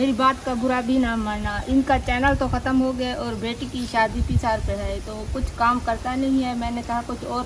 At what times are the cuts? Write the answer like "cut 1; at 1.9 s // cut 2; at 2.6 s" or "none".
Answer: none